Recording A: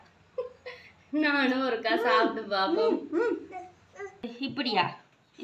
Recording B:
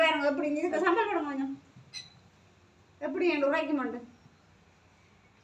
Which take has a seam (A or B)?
A